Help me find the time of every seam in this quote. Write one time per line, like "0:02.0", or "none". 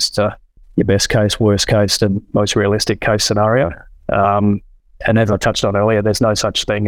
none